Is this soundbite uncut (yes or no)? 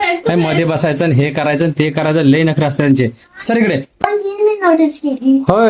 no